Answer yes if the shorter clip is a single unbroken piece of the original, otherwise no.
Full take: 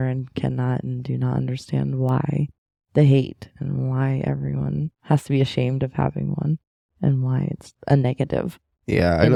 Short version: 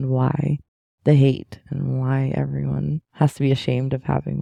yes